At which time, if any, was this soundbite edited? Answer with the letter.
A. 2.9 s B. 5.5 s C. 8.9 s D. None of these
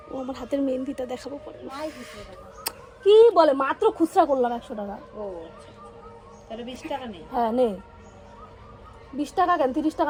D